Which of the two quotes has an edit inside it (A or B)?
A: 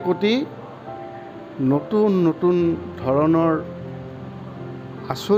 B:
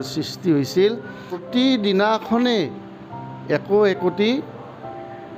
B